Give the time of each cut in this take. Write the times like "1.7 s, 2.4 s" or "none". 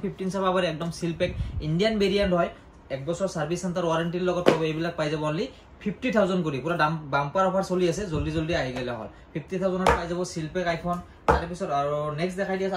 none